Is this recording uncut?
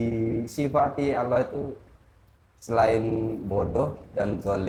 yes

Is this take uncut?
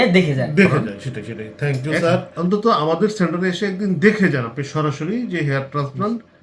no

